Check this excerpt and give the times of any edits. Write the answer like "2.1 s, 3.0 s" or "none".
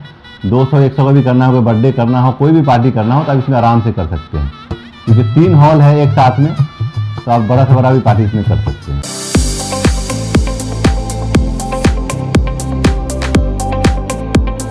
9.0 s